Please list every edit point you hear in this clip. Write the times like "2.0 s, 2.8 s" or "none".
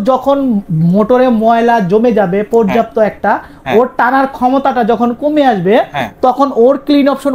none